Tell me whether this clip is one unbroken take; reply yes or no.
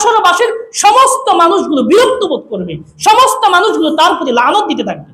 yes